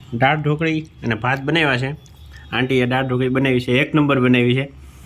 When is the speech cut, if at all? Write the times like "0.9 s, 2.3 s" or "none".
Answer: none